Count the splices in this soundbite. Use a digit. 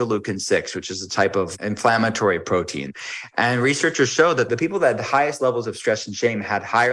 3